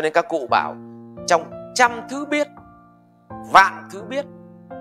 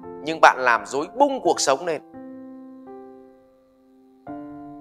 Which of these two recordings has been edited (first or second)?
second